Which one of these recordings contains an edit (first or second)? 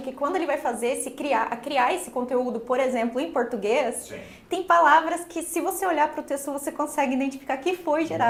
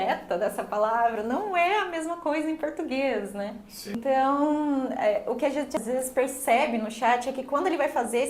second